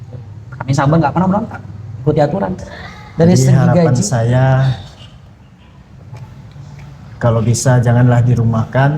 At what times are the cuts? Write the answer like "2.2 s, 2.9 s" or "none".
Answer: 4.1 s